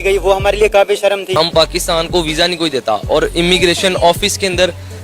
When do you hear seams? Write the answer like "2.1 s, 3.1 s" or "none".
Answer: 1.4 s